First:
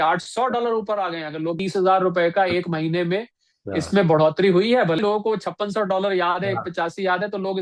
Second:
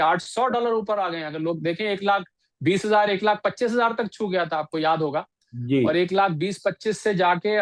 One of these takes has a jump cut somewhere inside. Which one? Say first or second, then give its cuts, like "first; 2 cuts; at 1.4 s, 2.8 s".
first; 2 cuts; at 1.6 s, 5.0 s